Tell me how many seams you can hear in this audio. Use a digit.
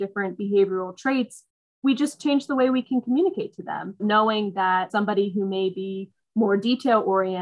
2